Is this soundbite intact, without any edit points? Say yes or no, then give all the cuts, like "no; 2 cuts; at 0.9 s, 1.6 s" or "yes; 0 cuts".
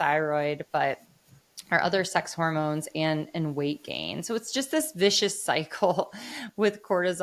yes; 0 cuts